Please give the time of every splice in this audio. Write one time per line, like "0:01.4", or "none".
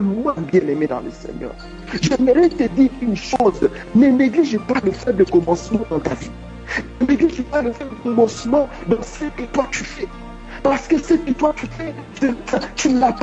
none